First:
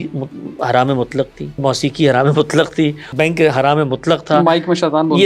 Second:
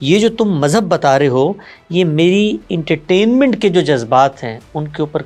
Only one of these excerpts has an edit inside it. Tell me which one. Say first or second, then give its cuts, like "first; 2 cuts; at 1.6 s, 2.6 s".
first; 2 cuts; at 1.6 s, 3.1 s